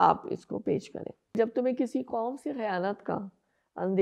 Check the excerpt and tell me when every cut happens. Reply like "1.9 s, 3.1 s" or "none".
1.3 s